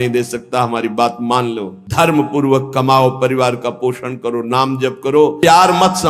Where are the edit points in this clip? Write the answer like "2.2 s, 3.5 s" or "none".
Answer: 1.8 s, 5.4 s